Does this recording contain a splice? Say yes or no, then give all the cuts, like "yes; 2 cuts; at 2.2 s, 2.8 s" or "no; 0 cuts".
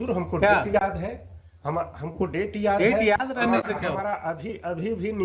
no; 0 cuts